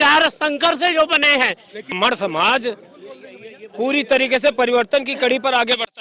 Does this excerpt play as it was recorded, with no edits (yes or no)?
no